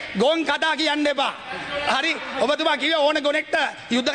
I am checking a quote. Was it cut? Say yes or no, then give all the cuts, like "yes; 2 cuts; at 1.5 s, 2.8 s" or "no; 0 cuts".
no; 0 cuts